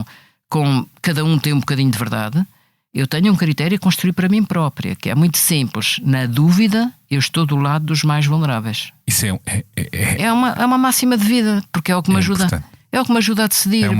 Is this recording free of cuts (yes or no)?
no